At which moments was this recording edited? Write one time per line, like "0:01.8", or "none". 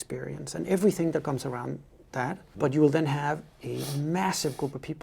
0:02.5